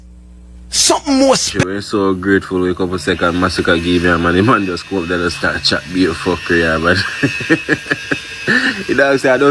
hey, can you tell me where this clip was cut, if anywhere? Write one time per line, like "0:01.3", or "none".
0:01.5